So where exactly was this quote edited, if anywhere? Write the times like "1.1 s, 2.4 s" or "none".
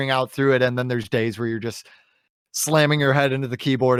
none